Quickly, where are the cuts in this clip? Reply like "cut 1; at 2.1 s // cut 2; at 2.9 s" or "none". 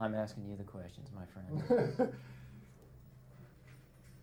none